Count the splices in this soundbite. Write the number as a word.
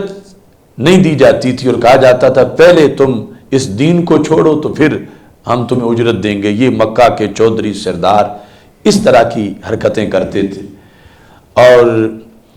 zero